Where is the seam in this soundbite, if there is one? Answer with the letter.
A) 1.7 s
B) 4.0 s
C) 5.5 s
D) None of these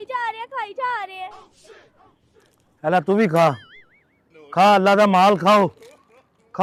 D